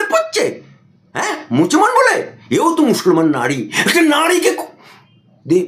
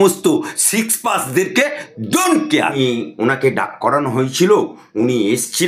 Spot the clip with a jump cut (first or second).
second